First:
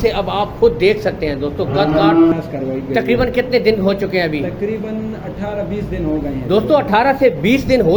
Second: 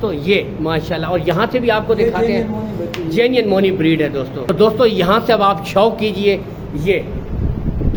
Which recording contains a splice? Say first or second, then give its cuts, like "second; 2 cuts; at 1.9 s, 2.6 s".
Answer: first; 1 cut; at 2.3 s